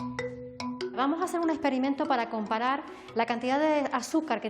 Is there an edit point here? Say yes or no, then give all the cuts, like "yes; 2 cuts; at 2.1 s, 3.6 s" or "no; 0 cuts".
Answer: yes; 1 cut; at 1.0 s